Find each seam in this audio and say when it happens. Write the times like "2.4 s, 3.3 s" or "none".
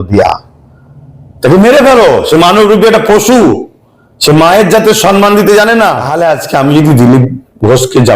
6.1 s